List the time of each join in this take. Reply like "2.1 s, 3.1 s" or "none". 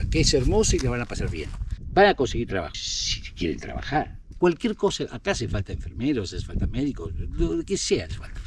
none